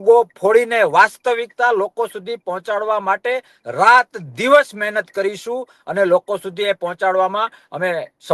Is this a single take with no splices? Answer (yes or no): yes